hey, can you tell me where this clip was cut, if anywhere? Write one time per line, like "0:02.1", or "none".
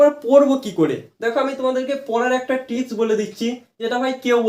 none